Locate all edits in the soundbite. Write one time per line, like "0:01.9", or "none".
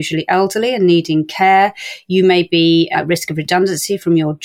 none